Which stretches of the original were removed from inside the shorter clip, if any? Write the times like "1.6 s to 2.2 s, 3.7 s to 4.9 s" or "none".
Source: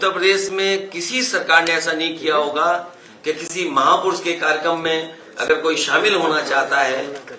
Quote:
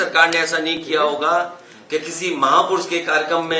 none